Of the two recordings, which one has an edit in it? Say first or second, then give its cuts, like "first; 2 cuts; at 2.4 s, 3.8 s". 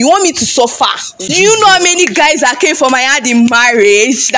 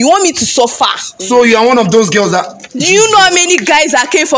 first; 1 cut; at 1.1 s